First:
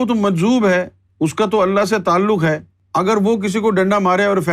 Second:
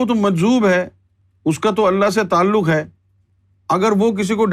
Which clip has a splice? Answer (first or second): first